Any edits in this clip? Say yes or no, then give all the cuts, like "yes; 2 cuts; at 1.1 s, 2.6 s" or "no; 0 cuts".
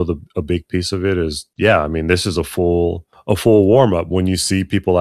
yes; 2 cuts; at 1.4 s, 3.1 s